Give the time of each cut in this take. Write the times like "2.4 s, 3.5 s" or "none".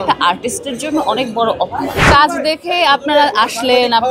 2.1 s